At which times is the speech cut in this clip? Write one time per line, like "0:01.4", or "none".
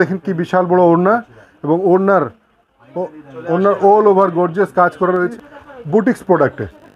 0:05.3